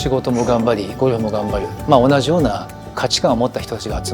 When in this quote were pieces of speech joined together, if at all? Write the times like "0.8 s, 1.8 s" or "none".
2.9 s